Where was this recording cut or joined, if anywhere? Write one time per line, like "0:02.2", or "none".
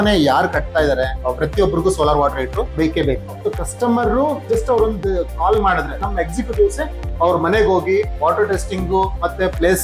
0:02.8
0:04.4
0:06.1